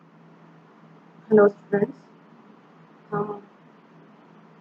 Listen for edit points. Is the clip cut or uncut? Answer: cut